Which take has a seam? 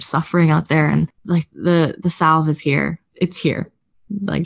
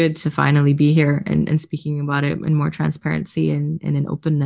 first; 2 cuts; at 1.2 s, 3.0 s

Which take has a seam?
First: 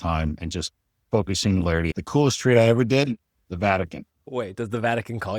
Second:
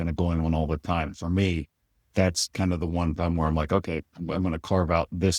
first; 3 cuts; at 0.9 s, 1.9 s, 4.2 s

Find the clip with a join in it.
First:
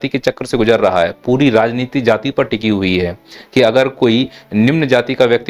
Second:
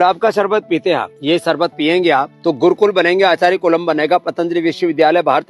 second; 2 cuts; at 1.1 s, 2.3 s

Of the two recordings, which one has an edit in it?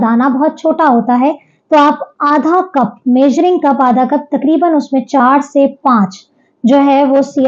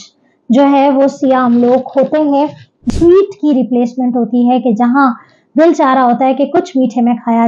second; 1 cut; at 2.8 s

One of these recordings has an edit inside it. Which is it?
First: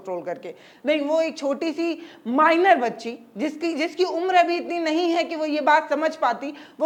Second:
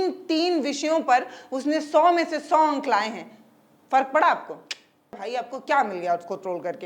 second; 1 cut; at 5.2 s

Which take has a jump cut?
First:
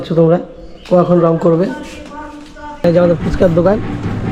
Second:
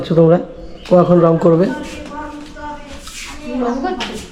first; 1 cut; at 2.8 s

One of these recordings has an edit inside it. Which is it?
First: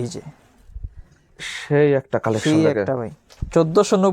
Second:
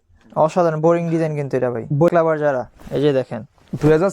second; 1 cut; at 2.1 s

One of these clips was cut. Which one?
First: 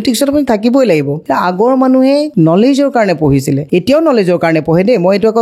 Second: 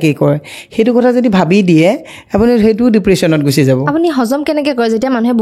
first; 3 cuts; at 1.2 s, 2.3 s, 3.6 s

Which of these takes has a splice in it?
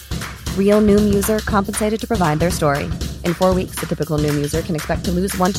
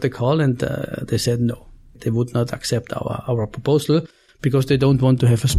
second; 1 cut; at 2.0 s

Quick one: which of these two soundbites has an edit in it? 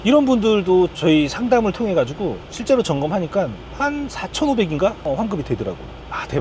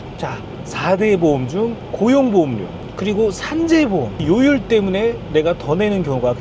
first; 1 cut; at 0.9 s

